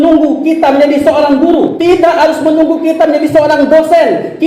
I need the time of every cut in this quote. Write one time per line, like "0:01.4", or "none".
0:01.7